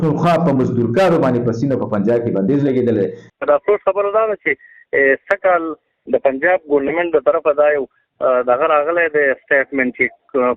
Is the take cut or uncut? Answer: cut